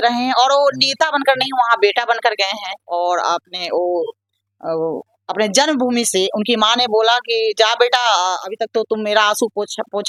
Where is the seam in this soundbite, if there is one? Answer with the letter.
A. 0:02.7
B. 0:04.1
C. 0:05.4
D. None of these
D